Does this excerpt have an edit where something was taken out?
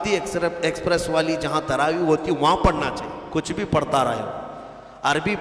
yes; 1 cut; at 3.1 s

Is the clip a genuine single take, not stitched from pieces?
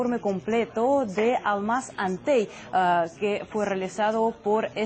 yes; 0 cuts

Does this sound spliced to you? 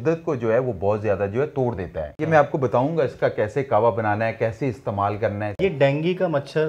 yes; 2 cuts; at 2.0 s, 5.6 s

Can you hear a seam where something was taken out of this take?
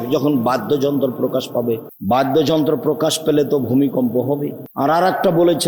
yes; 2 cuts; at 1.9 s, 4.6 s

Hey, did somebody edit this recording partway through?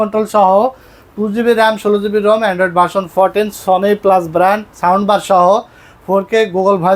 no; 0 cuts

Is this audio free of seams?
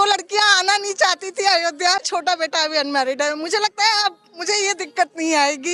no; 1 cut; at 2.1 s

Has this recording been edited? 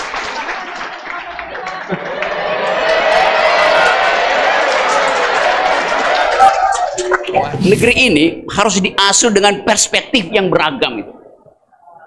yes; 1 cut; at 7.6 s

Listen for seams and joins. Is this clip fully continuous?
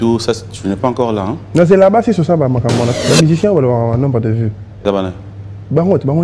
no; 1 cut; at 2.9 s

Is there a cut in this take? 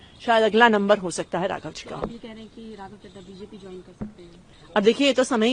no; 0 cuts

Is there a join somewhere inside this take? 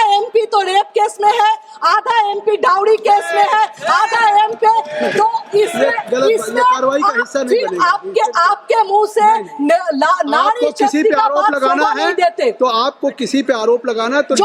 no; 0 cuts

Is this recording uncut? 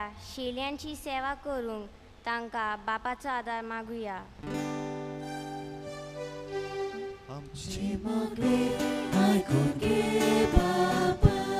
yes; 0 cuts

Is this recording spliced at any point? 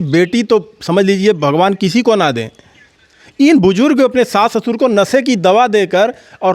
no; 0 cuts

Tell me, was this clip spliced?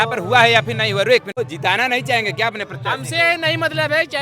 yes; 1 cut; at 1.4 s

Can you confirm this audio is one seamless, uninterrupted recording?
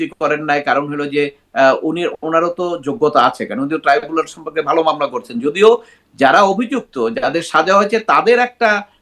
yes; 0 cuts

